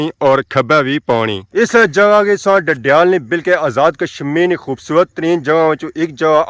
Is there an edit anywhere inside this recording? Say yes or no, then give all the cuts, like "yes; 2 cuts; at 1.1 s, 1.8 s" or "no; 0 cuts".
yes; 1 cut; at 1.4 s